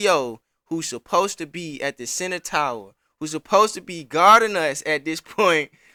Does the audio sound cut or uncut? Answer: uncut